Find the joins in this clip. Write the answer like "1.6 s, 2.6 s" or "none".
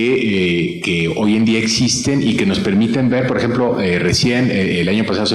1.3 s